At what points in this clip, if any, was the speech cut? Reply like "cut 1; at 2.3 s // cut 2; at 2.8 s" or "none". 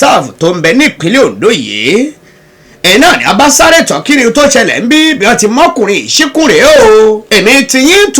cut 1; at 7.2 s